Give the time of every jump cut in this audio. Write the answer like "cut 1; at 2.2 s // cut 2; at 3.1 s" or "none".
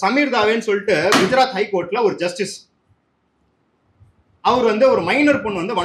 none